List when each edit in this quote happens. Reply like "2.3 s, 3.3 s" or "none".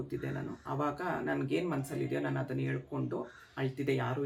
none